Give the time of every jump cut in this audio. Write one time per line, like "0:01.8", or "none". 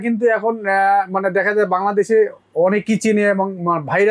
none